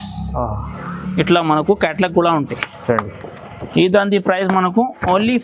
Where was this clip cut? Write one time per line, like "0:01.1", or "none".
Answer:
none